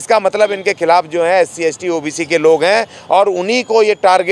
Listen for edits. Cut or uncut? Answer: uncut